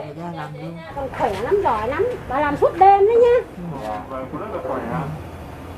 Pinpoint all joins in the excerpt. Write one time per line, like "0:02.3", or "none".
0:00.9